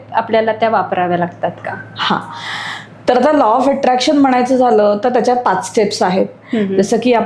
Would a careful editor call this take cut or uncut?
uncut